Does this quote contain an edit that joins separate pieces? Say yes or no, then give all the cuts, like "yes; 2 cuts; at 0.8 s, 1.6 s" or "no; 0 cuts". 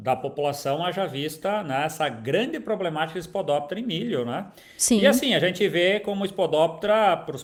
no; 0 cuts